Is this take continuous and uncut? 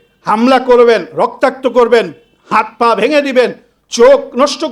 yes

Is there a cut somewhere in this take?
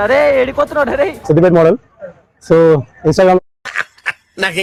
no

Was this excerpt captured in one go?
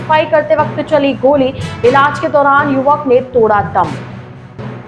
yes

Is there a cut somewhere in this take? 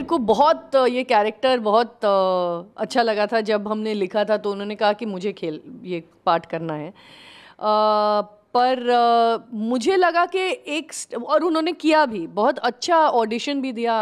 no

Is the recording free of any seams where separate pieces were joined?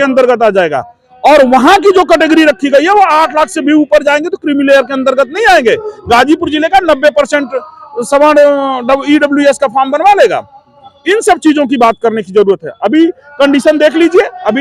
yes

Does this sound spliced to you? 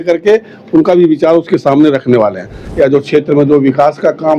yes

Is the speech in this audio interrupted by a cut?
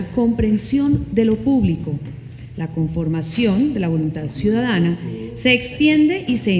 yes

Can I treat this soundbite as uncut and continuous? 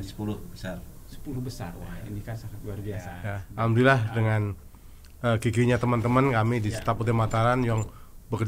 no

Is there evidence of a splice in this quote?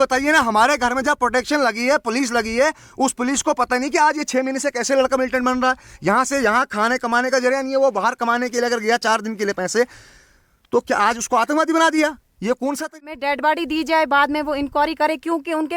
yes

